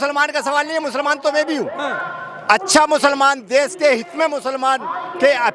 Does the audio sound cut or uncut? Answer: uncut